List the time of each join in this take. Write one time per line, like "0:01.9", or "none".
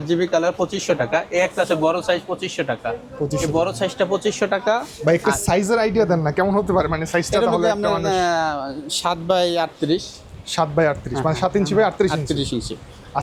none